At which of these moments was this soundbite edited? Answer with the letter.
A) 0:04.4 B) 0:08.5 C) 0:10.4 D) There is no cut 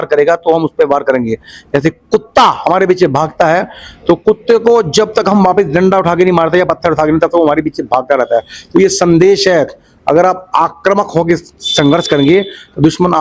D